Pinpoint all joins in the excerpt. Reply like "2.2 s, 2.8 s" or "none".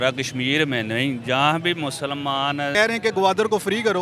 2.7 s